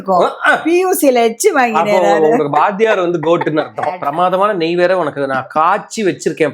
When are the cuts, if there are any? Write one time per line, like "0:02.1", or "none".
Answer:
0:04.0